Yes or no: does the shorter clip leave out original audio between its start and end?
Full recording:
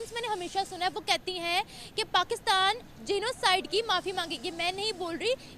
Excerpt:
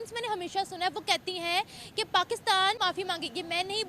yes